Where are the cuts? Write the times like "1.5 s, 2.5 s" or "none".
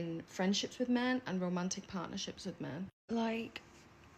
3.0 s